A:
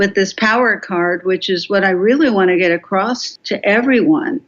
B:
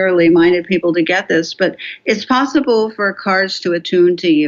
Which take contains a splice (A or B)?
A